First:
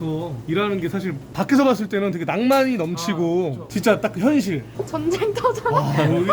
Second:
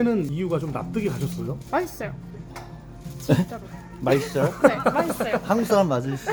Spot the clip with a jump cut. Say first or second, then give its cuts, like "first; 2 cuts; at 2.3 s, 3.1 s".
first; 1 cut; at 4.7 s